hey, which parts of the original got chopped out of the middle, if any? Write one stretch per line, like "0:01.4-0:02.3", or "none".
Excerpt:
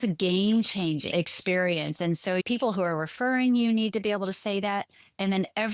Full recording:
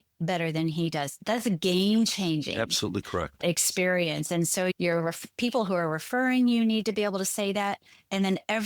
0:02.5-0:03.4
0:04.8-0:05.4